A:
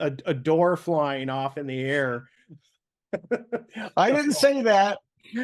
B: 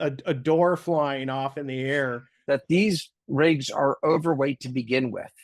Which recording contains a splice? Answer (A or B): B